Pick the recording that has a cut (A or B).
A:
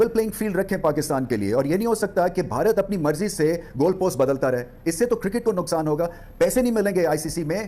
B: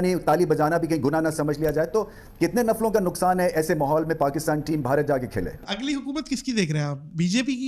B